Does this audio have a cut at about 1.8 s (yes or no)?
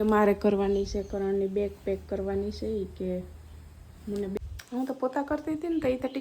no